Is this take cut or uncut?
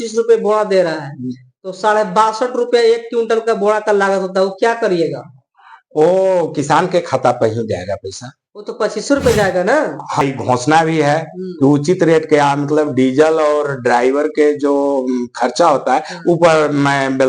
cut